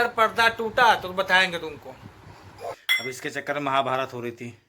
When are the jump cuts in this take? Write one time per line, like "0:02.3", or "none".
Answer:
0:02.9